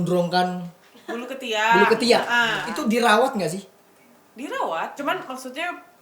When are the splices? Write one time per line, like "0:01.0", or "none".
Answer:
0:02.6
0:04.9